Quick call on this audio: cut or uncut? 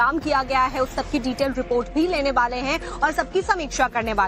uncut